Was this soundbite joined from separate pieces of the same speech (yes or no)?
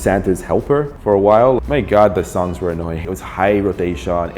yes